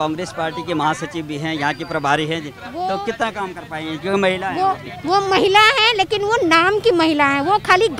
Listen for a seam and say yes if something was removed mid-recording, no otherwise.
no